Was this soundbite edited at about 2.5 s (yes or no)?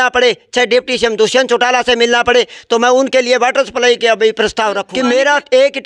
no